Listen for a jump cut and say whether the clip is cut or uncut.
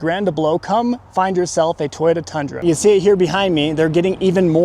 cut